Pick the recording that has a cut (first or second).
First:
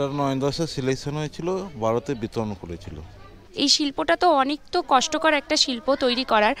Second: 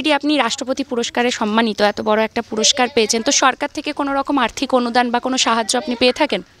first